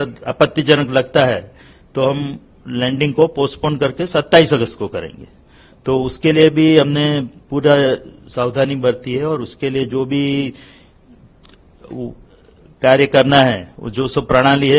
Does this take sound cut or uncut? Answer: uncut